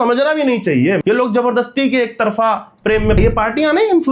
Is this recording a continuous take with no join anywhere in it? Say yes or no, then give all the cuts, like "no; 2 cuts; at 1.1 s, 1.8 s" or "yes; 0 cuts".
no; 2 cuts; at 1.0 s, 3.2 s